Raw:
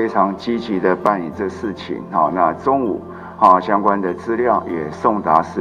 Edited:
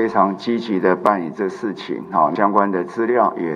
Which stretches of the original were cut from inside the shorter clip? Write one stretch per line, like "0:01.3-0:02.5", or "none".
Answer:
0:02.3-0:03.6